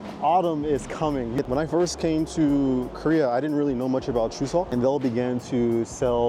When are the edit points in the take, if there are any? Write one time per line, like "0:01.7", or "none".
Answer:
0:01.4
0:04.7